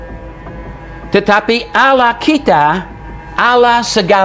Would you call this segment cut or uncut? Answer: uncut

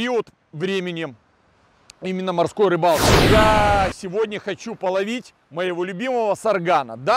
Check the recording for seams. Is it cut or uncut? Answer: cut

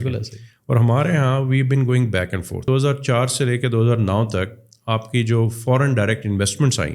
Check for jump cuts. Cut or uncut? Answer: cut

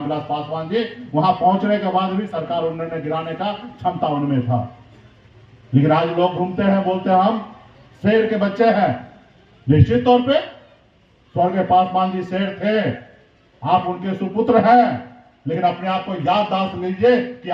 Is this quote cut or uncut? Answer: uncut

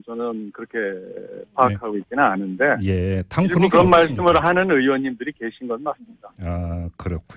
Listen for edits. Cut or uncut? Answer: cut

